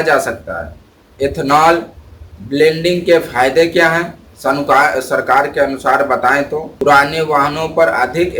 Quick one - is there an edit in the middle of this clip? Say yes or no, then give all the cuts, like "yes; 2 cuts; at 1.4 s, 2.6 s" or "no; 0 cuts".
yes; 1 cut; at 6.7 s